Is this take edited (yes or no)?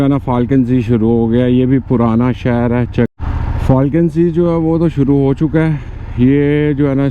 yes